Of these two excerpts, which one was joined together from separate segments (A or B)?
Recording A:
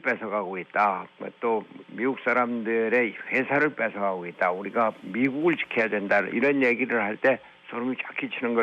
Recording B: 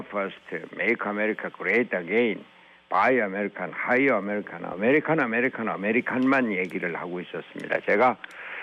A